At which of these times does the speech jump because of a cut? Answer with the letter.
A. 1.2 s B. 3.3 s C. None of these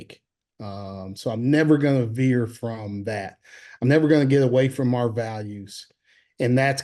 C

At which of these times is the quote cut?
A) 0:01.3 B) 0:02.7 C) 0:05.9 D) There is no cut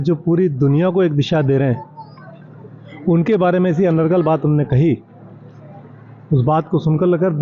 D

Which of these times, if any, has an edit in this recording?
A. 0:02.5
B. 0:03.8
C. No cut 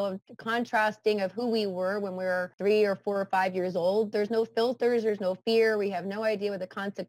A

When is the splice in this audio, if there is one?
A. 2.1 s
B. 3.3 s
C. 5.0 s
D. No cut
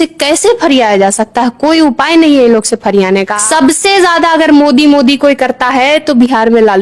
B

